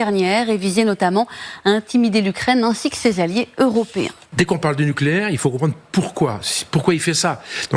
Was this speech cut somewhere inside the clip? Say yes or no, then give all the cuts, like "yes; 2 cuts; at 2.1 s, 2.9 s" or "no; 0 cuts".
yes; 1 cut; at 4.2 s